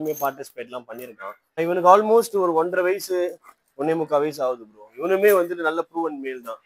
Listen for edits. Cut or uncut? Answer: cut